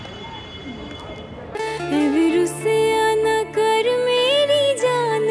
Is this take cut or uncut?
uncut